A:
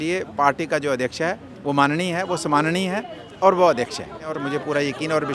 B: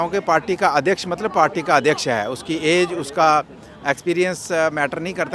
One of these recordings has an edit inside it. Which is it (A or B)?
A